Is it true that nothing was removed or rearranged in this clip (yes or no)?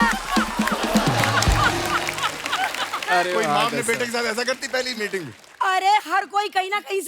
yes